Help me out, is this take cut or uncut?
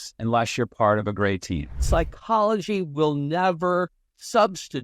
cut